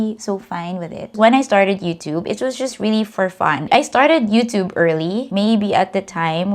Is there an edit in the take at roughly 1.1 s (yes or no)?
yes